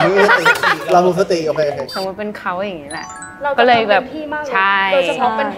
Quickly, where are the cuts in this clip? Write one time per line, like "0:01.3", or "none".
0:01.9